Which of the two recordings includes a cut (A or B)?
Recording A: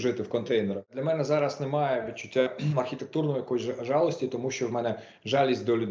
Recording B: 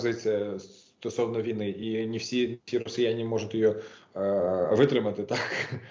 A